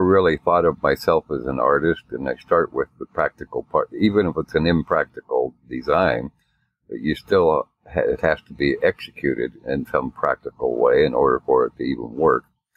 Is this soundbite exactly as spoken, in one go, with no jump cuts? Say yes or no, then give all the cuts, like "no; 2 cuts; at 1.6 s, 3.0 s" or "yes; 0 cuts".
yes; 0 cuts